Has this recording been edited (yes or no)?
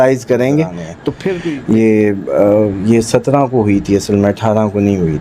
yes